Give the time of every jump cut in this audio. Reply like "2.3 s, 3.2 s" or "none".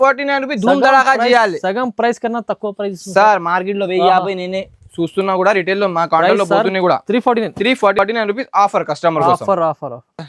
none